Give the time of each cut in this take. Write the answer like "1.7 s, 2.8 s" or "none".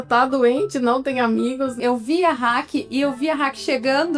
1.7 s